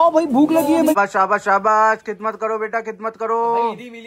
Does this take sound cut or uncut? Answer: cut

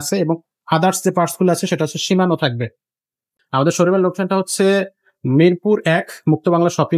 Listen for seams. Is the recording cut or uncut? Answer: cut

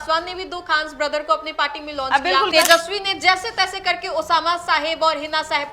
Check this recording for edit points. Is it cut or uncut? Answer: cut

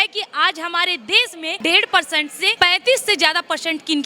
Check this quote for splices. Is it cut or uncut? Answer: cut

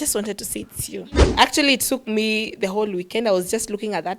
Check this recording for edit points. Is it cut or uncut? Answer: cut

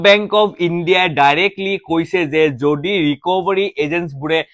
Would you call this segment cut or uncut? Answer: uncut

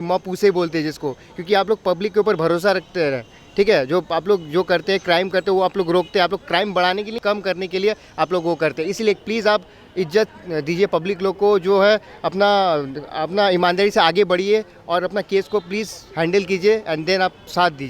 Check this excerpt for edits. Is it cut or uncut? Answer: uncut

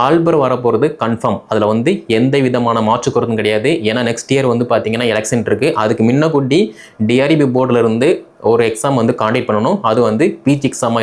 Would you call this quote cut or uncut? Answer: uncut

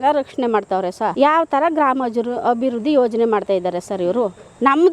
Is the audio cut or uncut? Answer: cut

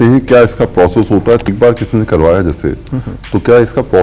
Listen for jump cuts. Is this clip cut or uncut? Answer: cut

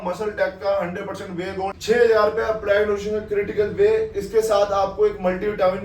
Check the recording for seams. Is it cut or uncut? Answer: cut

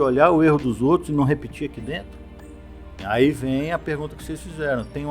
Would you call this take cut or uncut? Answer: cut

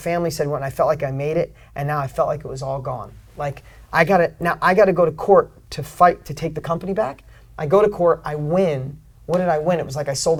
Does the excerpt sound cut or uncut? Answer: uncut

